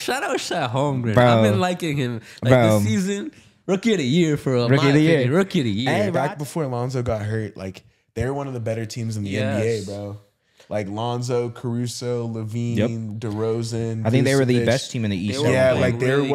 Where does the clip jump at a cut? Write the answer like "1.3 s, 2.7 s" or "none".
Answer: 6.1 s